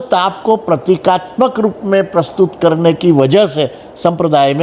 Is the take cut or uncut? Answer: uncut